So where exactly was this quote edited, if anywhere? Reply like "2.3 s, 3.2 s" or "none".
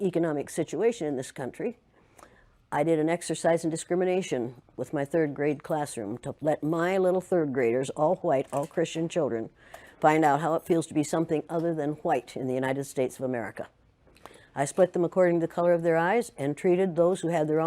6.2 s